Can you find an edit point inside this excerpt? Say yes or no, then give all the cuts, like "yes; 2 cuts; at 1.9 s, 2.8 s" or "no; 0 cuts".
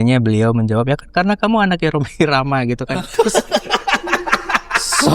no; 0 cuts